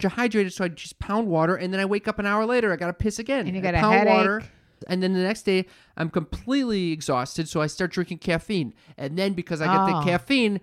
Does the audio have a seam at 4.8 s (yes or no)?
yes